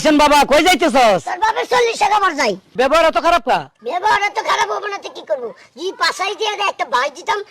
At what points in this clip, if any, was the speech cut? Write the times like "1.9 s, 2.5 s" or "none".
2.7 s, 3.8 s